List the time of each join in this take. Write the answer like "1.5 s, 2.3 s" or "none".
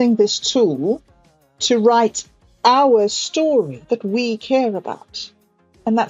3.8 s